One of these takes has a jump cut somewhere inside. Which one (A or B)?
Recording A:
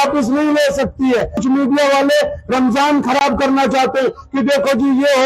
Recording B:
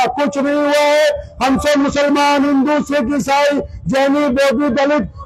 A